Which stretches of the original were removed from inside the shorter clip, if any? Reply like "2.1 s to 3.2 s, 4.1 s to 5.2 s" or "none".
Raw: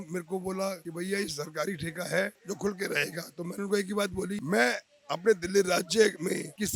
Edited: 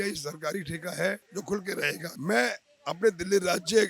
3.3 s to 4.4 s